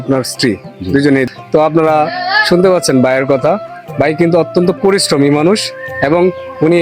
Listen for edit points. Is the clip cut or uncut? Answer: cut